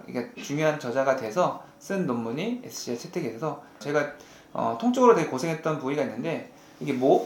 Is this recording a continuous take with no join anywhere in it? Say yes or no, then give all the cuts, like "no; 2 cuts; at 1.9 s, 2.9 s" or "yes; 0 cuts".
no; 1 cut; at 3.8 s